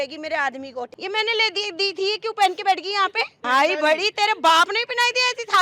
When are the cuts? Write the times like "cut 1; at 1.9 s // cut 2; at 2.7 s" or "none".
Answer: cut 1; at 0.9 s // cut 2; at 3.4 s